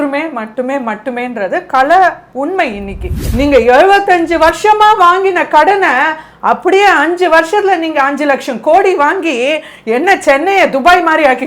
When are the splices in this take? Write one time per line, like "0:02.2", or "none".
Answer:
0:03.2